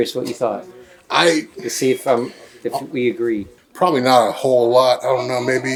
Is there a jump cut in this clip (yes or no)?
no